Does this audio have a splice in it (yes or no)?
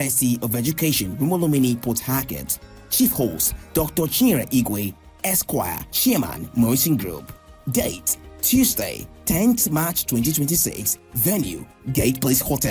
no